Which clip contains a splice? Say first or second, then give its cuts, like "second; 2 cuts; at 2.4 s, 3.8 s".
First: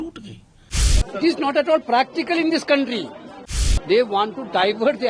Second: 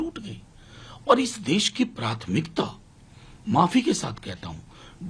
first; 2 cuts; at 1.0 s, 3.7 s